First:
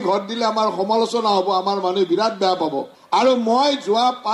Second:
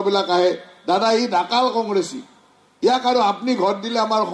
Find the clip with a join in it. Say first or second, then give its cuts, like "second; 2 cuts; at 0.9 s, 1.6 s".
first; 1 cut; at 2.9 s